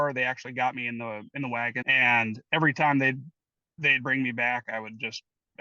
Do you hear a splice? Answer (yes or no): yes